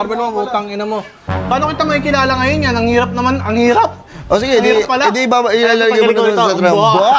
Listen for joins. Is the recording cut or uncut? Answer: uncut